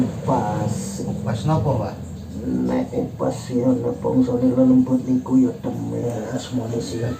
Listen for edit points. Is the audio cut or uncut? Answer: cut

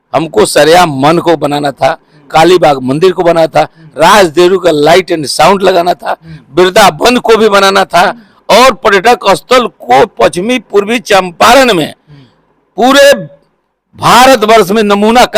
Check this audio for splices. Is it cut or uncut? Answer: uncut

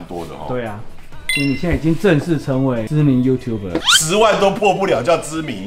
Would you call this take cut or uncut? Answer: cut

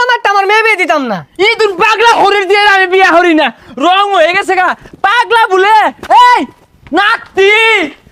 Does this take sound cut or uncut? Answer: uncut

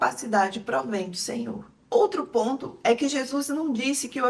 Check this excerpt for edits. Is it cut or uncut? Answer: cut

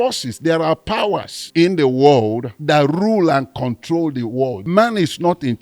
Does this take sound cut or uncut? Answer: cut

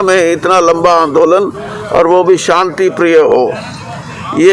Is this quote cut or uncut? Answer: uncut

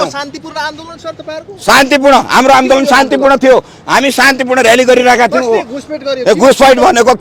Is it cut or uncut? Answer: uncut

